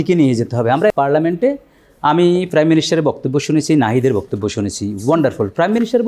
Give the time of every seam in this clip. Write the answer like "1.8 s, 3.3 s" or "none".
0.9 s